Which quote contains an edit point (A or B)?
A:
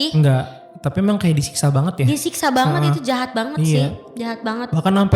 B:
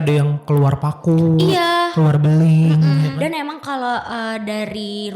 B